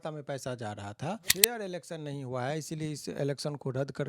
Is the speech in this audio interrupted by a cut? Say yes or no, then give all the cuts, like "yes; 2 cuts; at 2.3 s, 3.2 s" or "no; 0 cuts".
yes; 1 cut; at 1.3 s